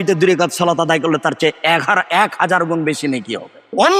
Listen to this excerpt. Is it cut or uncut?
uncut